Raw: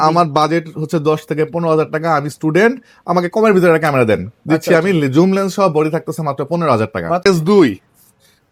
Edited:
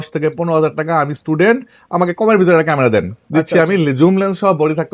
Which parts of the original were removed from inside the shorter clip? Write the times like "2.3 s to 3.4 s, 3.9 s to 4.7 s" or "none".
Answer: none